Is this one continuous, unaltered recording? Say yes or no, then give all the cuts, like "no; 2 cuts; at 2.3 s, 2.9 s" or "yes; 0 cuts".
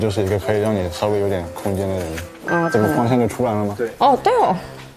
yes; 0 cuts